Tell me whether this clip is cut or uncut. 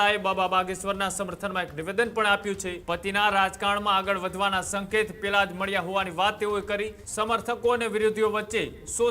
cut